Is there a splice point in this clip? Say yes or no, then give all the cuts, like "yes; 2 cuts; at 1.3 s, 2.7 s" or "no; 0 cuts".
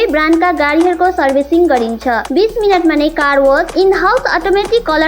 no; 0 cuts